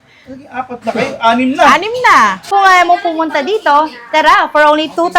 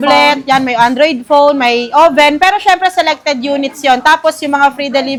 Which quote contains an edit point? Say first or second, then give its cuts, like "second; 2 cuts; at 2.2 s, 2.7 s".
first; 1 cut; at 2.4 s